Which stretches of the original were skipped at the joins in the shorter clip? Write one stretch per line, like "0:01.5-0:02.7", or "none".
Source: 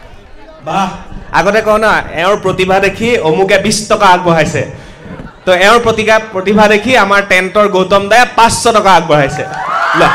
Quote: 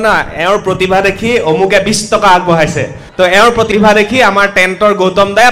0:04.8-0:05.3
0:06.0-0:06.4